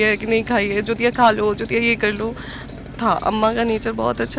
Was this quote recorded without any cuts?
yes; 0 cuts

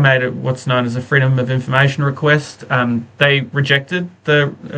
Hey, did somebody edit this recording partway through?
no; 0 cuts

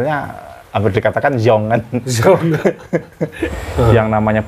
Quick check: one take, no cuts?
no; 1 cut; at 3.4 s

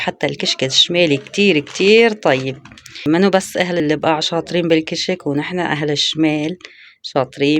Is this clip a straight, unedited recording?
no; 2 cuts; at 3.0 s, 3.8 s

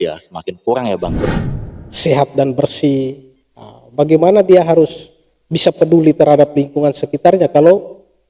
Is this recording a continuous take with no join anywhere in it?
no; 1 cut; at 1.3 s

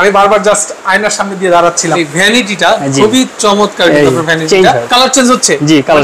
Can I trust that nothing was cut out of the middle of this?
no; 2 cuts; at 2.0 s, 4.8 s

